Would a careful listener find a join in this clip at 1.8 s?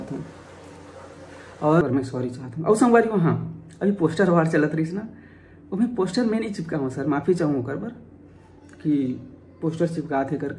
yes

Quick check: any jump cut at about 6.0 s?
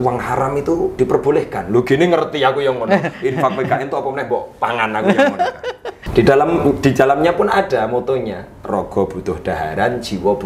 yes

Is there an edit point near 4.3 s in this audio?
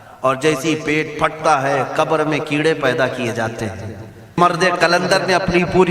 yes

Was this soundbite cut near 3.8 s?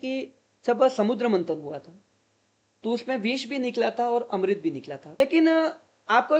no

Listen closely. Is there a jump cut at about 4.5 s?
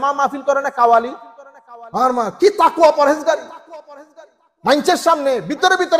no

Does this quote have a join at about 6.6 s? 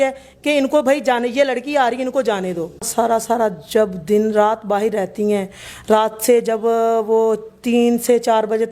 no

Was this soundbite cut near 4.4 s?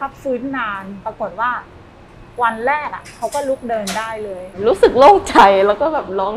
yes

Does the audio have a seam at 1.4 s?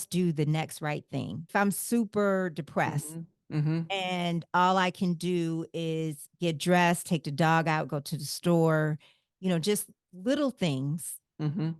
yes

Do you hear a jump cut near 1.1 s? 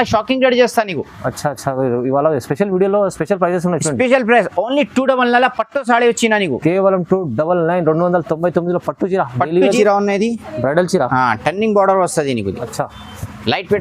no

